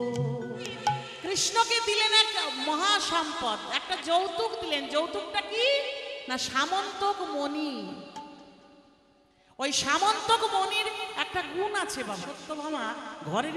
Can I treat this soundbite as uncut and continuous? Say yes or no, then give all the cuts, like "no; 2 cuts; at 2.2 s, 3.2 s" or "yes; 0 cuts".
no; 2 cuts; at 1.1 s, 12.4 s